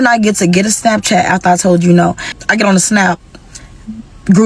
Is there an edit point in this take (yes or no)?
yes